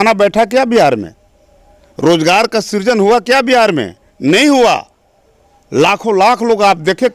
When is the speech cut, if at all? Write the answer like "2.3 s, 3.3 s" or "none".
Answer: none